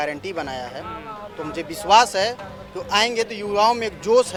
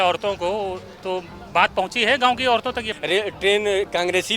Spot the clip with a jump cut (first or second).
second